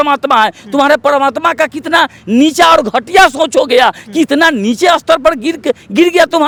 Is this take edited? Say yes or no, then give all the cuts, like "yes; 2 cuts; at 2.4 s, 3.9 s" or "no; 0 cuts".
no; 0 cuts